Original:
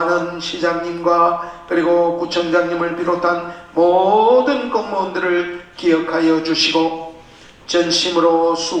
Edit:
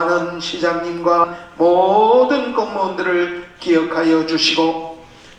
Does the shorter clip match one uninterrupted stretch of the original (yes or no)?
no